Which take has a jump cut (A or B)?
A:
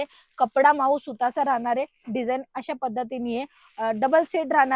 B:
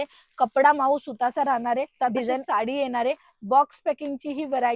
B